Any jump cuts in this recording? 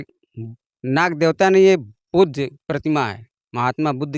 no; 0 cuts

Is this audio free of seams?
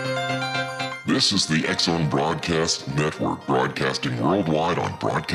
no; 1 cut; at 0.9 s

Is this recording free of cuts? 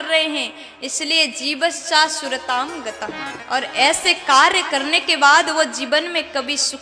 no; 1 cut; at 3.3 s

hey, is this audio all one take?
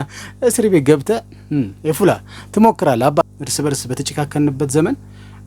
no; 1 cut; at 3.2 s

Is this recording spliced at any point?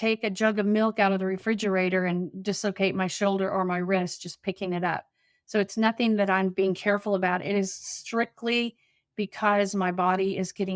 no; 0 cuts

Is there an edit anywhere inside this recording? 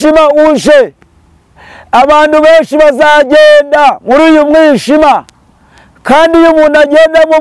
no; 0 cuts

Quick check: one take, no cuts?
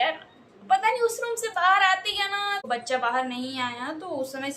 no; 1 cut; at 2.7 s

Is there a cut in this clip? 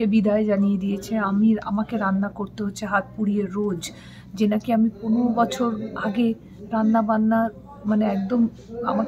no; 0 cuts

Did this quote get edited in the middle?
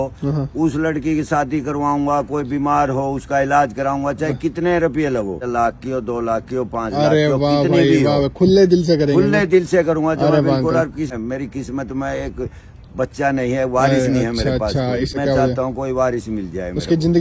yes; 3 cuts; at 5.4 s, 11.1 s, 15.1 s

